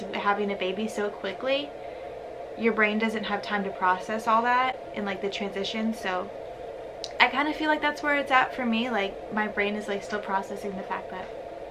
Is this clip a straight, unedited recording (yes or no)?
yes